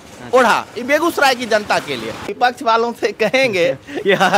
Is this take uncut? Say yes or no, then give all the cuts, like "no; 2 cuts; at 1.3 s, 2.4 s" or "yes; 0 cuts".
no; 1 cut; at 2.3 s